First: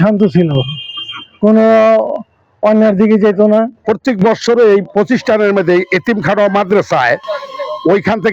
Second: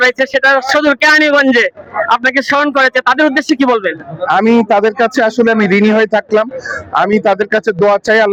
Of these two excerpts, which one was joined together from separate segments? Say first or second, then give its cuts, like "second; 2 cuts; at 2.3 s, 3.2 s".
first; 1 cut; at 3.8 s